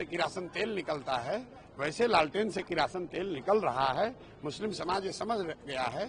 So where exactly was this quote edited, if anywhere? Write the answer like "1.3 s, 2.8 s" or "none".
none